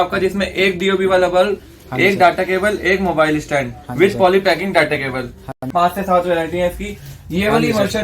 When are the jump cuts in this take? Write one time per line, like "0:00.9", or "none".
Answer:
0:05.7